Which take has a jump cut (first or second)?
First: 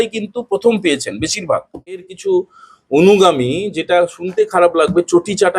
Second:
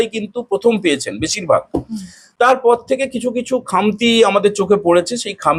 first